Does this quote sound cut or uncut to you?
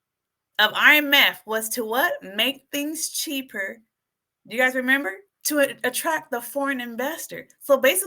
cut